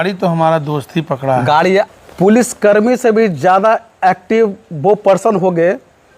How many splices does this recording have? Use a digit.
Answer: 1